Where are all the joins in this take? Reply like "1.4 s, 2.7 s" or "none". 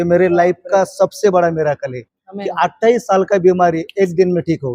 none